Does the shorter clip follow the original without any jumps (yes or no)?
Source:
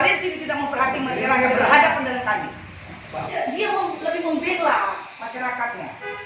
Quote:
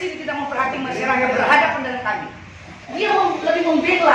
no